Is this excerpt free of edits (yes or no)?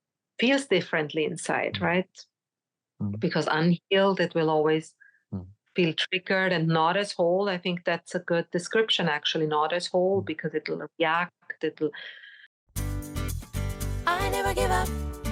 no